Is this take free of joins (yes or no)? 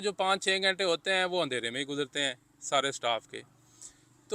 yes